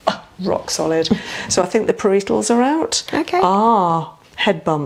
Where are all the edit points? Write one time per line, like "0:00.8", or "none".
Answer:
none